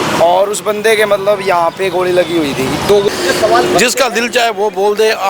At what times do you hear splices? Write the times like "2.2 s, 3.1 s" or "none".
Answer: 3.1 s